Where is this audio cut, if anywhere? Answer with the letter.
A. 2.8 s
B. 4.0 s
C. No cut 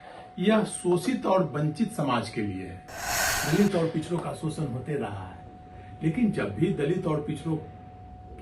A